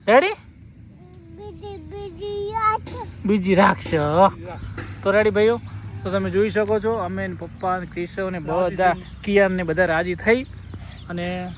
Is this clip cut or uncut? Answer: uncut